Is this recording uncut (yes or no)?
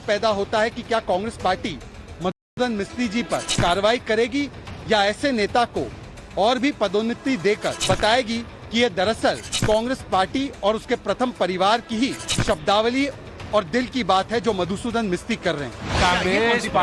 no